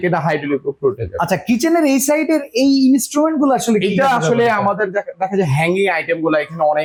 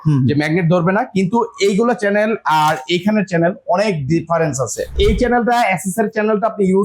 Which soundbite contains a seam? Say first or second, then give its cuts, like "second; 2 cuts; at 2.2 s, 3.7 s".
second; 1 cut; at 4.9 s